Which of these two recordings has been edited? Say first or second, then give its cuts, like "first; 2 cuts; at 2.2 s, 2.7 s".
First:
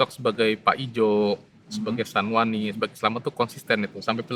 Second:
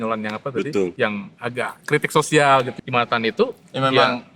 second; 2 cuts; at 0.9 s, 2.7 s